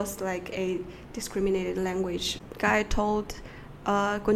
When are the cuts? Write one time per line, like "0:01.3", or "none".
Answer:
0:02.3

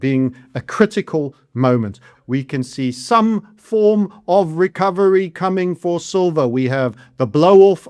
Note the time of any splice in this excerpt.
0:02.1

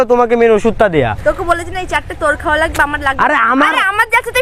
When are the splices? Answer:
0:01.2

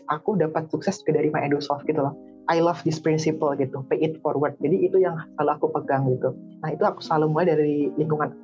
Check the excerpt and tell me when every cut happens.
0:02.3

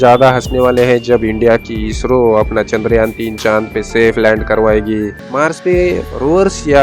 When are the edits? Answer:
0:05.3

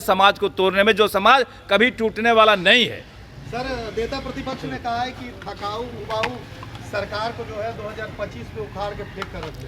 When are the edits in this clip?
none

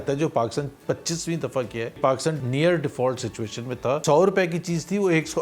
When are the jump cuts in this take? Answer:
0:02.2
0:04.0

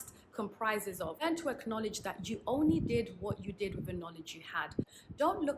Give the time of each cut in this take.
0:01.2
0:04.8

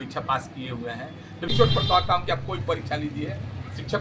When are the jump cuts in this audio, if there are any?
0:01.5

